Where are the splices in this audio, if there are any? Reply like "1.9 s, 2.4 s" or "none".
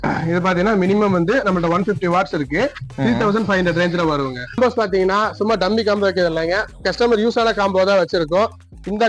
4.6 s